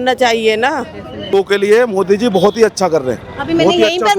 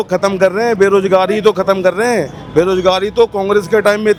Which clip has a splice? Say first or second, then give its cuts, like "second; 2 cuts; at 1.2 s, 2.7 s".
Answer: first; 1 cut; at 1.3 s